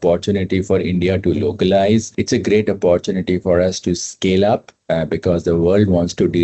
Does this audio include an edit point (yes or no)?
no